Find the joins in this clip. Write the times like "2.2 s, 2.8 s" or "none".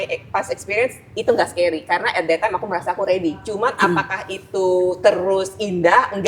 3.4 s